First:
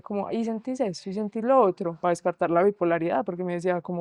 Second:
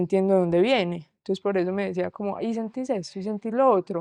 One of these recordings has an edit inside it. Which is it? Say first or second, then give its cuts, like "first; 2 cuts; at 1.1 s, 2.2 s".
second; 1 cut; at 1.1 s